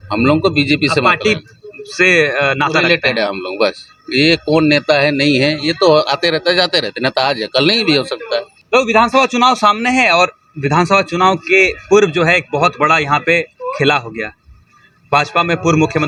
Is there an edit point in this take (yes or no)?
no